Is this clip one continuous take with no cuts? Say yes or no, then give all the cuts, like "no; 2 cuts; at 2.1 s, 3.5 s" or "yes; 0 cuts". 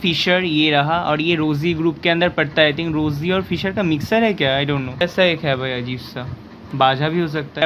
yes; 0 cuts